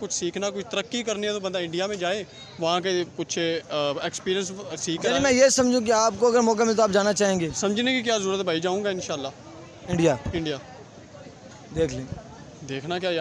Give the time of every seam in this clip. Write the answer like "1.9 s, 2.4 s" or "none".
none